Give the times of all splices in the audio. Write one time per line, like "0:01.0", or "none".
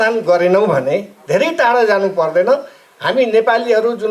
0:01.1